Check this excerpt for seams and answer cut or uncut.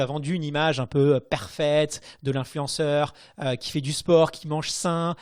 uncut